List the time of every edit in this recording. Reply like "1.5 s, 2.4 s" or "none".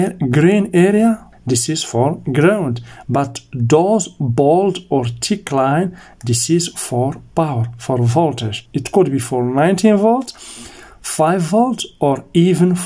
1.3 s, 8.6 s

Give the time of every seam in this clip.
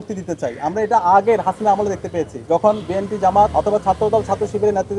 2.3 s, 3.5 s

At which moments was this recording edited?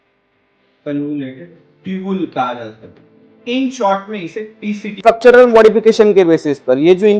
5.0 s

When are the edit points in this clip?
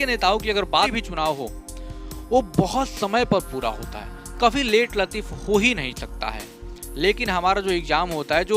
0.9 s

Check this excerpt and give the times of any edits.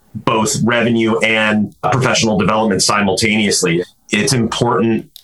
1.8 s, 3.8 s

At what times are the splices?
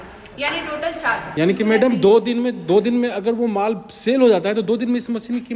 1.3 s

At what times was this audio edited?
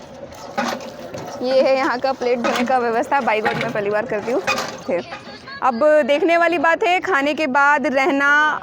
4.8 s

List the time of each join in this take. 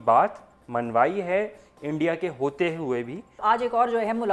3.4 s

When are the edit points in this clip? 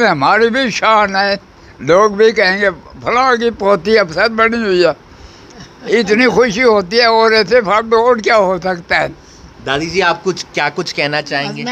none

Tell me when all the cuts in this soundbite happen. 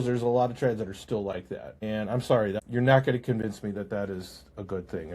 1.7 s, 2.6 s

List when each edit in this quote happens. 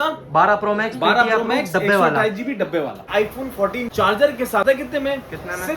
3.3 s, 4.6 s

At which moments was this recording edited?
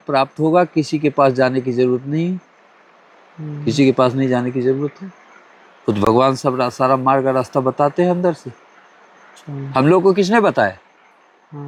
none

